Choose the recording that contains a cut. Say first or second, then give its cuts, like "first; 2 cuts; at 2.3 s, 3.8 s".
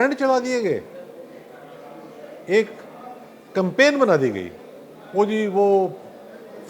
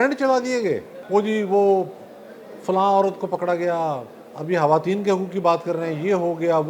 second; 1 cut; at 0.9 s